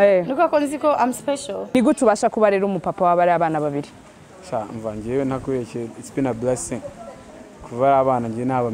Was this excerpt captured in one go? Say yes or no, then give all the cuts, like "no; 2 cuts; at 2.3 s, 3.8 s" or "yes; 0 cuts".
no; 1 cut; at 1.7 s